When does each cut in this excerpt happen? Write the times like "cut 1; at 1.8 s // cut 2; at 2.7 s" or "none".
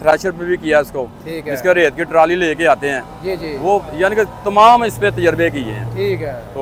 none